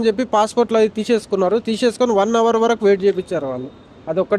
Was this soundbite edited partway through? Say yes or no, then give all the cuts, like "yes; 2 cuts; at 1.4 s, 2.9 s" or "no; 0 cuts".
no; 0 cuts